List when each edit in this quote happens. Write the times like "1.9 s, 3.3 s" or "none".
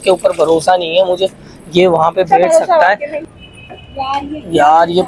3.1 s

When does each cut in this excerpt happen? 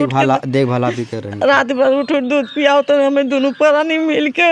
none

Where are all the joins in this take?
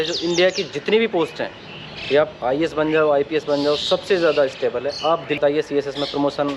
5.4 s

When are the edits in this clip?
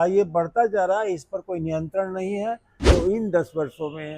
2.7 s

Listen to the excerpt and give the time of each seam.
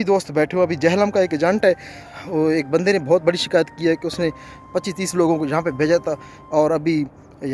2.0 s

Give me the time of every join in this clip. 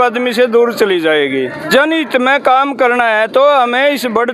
1.6 s

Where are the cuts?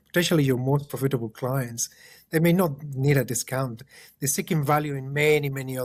none

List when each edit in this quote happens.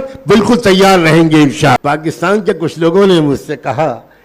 1.8 s

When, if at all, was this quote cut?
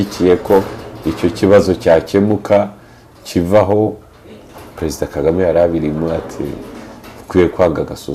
none

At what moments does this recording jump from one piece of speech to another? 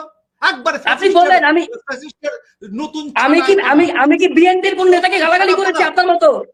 none

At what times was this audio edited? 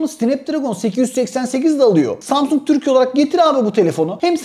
2.1 s

